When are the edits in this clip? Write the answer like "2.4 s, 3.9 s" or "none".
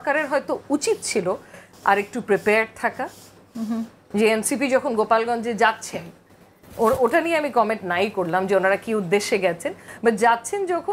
none